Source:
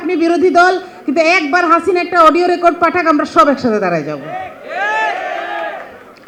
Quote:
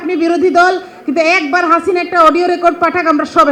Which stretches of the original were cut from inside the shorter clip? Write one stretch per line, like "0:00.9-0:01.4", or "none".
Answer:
none